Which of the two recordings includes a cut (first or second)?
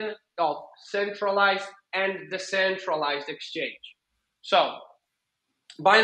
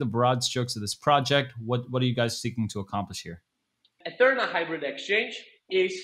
second